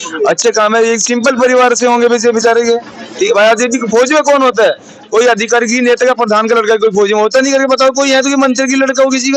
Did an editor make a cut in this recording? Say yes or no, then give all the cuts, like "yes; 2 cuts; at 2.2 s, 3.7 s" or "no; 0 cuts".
no; 0 cuts